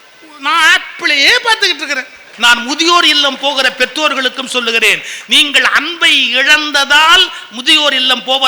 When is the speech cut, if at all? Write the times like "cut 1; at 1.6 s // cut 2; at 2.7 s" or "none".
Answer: cut 1; at 2.2 s